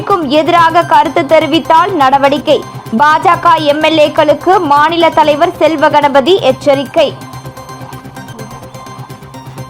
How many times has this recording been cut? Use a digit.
0